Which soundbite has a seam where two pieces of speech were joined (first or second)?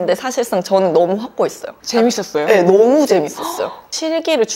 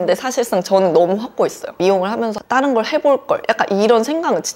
second